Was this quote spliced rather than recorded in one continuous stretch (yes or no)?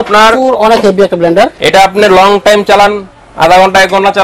yes